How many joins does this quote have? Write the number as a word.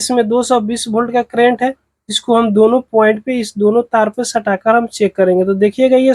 zero